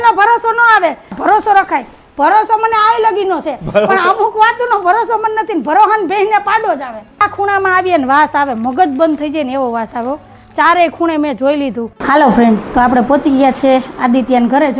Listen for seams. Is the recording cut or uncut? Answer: cut